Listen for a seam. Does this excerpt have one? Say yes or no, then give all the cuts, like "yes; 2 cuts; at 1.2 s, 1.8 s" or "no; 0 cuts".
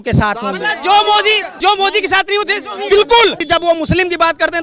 yes; 2 cuts; at 1.6 s, 3.4 s